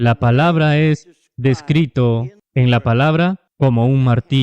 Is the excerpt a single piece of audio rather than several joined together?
no; 2 cuts; at 2.4 s, 3.5 s

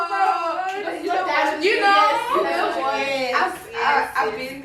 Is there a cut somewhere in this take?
no; 0 cuts

